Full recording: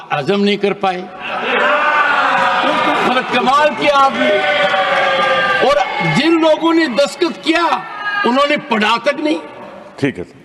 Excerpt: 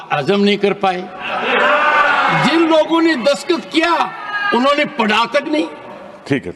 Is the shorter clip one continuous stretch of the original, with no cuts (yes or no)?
no